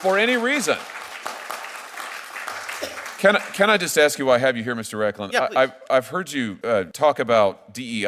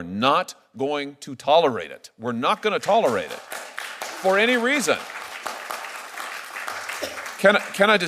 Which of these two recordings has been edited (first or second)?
first